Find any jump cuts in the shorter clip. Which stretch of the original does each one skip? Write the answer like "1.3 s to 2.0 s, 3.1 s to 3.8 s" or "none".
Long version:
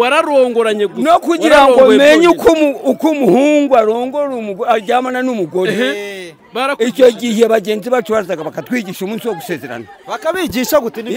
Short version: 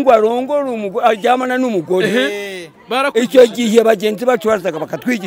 none